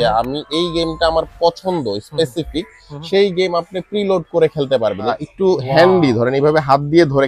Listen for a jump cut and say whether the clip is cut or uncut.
cut